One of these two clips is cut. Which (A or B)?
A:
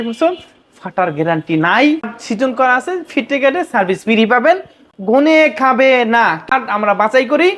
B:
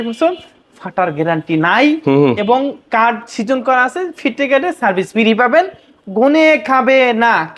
A